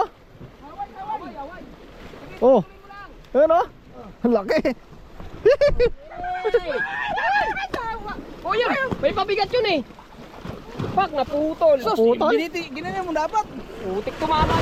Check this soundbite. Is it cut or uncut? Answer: uncut